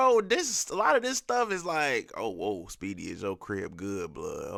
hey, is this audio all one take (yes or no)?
yes